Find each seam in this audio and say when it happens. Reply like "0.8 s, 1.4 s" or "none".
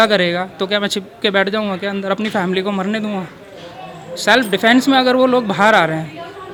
none